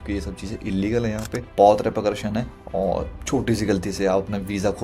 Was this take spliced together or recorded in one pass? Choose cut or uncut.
cut